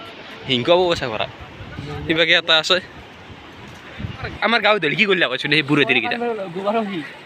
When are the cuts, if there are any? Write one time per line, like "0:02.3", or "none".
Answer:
0:04.3